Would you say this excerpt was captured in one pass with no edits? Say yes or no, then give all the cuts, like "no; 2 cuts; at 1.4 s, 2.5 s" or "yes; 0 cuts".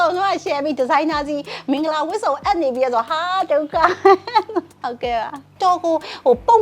no; 1 cut; at 5.5 s